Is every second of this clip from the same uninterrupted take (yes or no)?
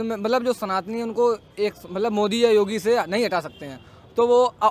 yes